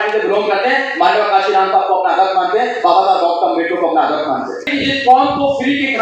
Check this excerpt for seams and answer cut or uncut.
cut